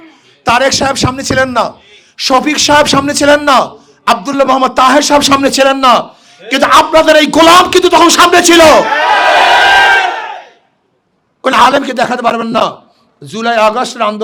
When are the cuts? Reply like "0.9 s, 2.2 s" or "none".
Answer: none